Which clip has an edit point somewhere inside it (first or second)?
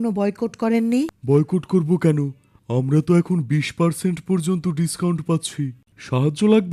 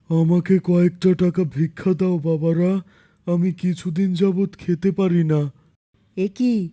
first